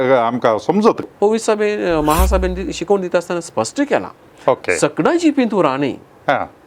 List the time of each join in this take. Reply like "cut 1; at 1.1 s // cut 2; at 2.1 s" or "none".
cut 1; at 1.0 s